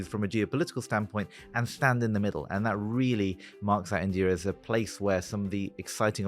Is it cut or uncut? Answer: uncut